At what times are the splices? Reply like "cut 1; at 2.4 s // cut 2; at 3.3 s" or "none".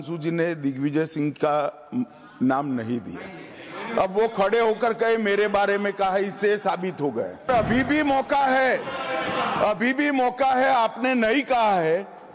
cut 1; at 7.5 s